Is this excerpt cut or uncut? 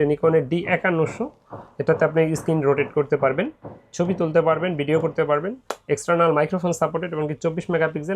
uncut